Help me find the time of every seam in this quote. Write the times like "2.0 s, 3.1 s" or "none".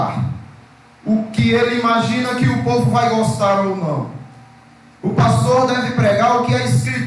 none